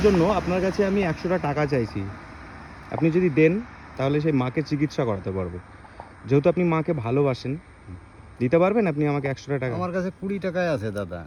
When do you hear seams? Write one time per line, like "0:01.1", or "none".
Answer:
none